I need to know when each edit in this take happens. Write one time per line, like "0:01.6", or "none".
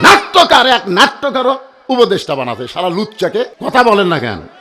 0:03.5